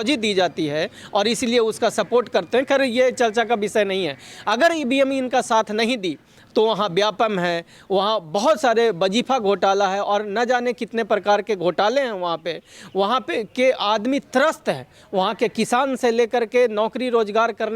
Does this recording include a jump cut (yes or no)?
no